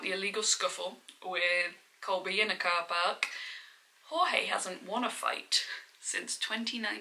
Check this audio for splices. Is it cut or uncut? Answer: uncut